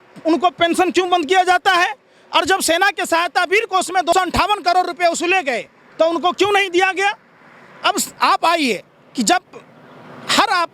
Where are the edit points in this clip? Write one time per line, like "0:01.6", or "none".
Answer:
0:04.1

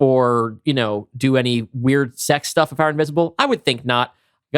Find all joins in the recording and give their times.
none

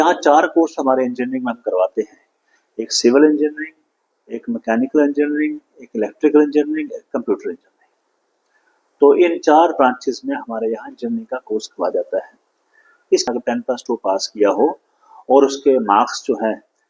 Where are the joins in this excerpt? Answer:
0:13.3

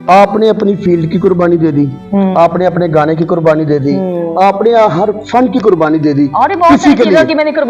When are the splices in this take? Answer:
none

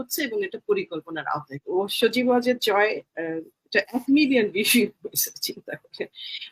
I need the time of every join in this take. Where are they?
0:01.6

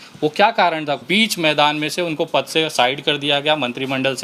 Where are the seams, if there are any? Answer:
0:01.0

